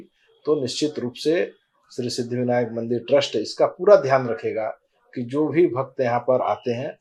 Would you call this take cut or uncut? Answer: uncut